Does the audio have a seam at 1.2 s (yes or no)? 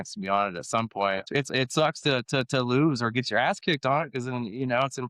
yes